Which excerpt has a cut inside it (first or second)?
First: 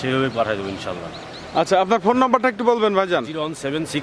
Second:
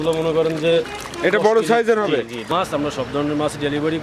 second